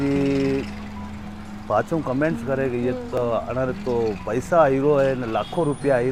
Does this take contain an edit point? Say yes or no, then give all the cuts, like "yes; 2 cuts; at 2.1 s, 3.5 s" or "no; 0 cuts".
no; 0 cuts